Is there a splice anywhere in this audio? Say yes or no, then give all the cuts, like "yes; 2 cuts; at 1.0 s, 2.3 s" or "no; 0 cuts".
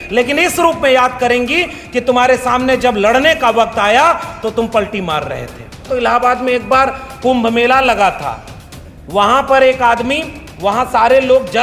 yes; 1 cut; at 5.9 s